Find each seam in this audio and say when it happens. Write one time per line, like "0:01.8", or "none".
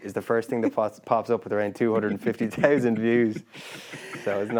none